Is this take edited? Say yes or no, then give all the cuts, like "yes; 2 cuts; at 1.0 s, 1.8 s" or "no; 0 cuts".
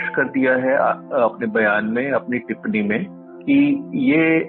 no; 0 cuts